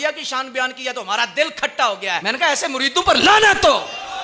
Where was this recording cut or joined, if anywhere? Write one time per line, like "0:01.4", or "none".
0:02.2